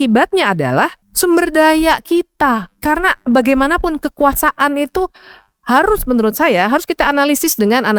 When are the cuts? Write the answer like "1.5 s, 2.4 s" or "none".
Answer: 1.0 s